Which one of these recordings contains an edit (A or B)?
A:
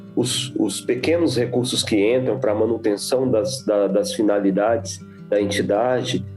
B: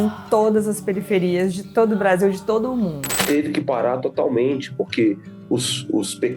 B